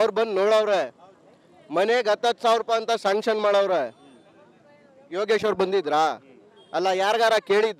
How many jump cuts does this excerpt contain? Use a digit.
0